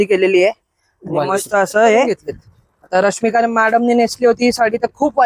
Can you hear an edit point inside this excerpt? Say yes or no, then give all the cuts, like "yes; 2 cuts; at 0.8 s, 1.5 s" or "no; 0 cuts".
yes; 1 cut; at 2.2 s